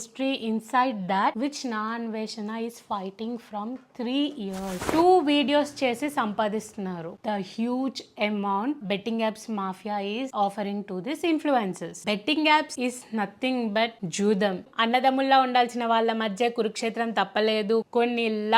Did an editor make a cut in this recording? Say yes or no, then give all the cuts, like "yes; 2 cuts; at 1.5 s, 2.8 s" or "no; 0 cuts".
yes; 3 cuts; at 4.9 s, 12.0 s, 14.7 s